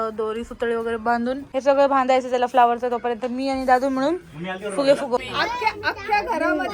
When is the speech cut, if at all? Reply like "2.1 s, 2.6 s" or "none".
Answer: 1.4 s, 5.2 s